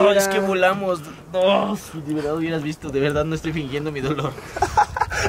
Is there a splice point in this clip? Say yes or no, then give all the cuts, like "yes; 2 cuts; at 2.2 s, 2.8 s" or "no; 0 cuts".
no; 0 cuts